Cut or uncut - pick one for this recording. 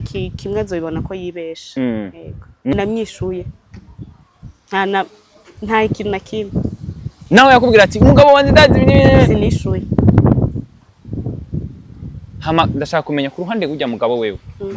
cut